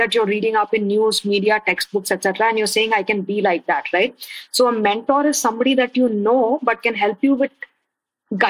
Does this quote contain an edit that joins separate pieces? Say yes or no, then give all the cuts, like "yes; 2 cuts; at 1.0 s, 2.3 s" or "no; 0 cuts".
no; 0 cuts